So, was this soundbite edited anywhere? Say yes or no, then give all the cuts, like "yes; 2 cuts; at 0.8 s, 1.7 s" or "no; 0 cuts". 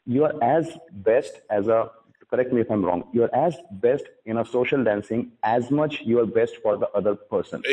no; 0 cuts